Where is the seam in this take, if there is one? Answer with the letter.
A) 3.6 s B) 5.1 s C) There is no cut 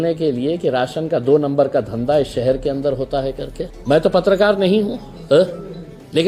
A